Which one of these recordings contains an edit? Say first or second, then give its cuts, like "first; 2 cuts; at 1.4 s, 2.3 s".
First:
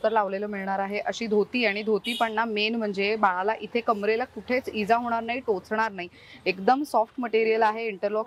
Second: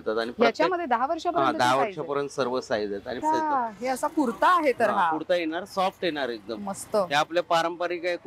second; 1 cut; at 3.2 s